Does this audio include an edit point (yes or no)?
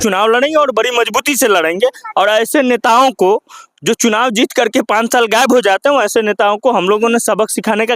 no